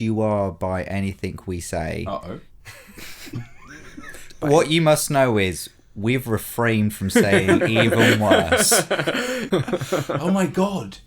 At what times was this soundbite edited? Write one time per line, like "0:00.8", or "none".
0:09.5